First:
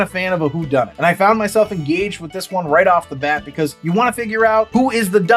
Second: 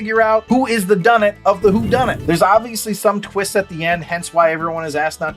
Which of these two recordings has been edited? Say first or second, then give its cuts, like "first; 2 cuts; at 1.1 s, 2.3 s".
second; 1 cut; at 2.2 s